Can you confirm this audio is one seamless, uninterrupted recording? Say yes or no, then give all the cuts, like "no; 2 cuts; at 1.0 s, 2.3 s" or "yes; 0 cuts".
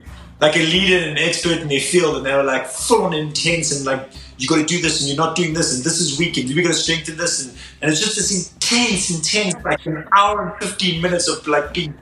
no; 1 cut; at 7.6 s